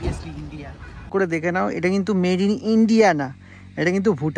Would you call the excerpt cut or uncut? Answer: cut